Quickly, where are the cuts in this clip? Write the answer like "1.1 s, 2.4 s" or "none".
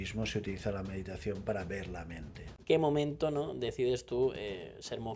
2.6 s